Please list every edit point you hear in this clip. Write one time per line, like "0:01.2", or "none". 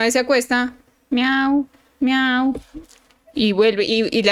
none